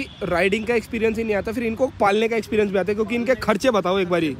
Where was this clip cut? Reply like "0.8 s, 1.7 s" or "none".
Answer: none